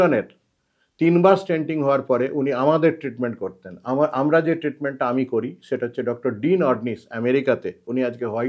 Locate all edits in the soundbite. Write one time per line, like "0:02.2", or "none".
none